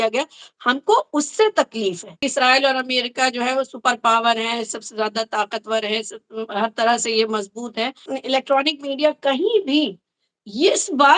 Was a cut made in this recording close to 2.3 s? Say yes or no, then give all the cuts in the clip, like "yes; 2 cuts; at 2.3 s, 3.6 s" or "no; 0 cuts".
yes; 2 cuts; at 2.3 s, 8.1 s